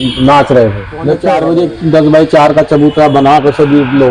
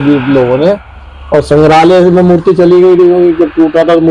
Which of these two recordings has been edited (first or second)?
first